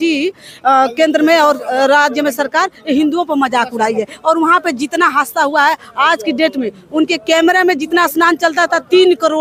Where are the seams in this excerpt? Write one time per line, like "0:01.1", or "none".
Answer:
none